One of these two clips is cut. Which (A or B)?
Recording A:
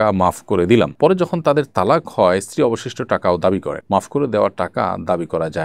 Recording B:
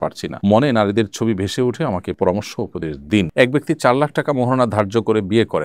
B